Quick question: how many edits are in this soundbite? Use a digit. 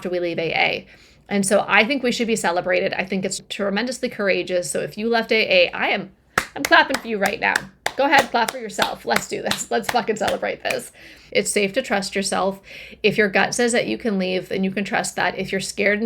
1